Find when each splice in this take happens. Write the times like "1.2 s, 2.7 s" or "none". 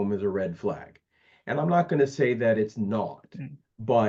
none